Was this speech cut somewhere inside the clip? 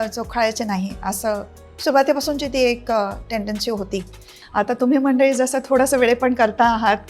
yes; 1 cut; at 4.4 s

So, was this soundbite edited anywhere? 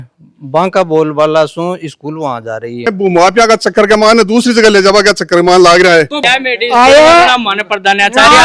yes; 2 cuts; at 2.9 s, 6.3 s

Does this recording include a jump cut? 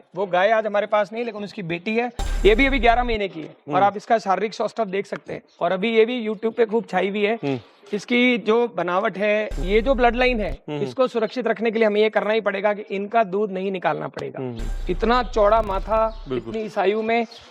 yes; 3 cuts; at 2.2 s, 9.6 s, 14.8 s

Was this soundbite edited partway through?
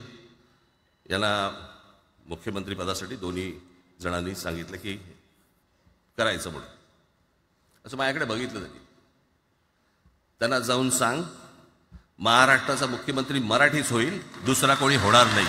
no; 0 cuts

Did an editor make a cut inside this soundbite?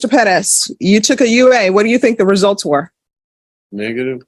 no; 0 cuts

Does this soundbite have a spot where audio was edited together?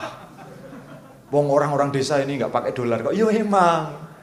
no; 0 cuts

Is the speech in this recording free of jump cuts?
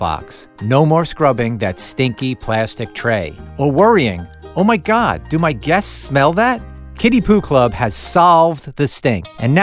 yes; 0 cuts

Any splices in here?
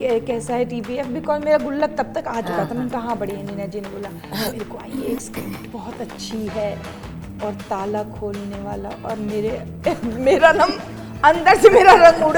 no; 0 cuts

